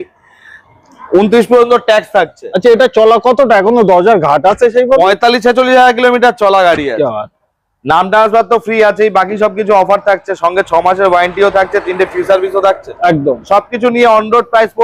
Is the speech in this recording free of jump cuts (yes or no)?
yes